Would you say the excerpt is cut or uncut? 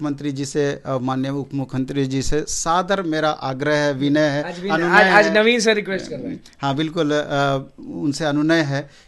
uncut